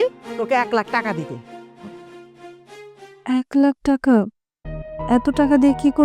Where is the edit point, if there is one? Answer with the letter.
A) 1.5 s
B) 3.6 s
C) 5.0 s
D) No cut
D